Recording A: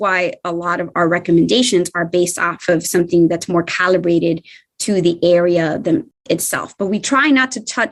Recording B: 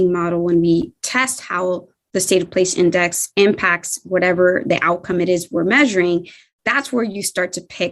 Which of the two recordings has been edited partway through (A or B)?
B